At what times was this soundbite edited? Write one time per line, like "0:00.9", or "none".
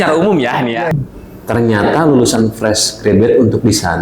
0:00.9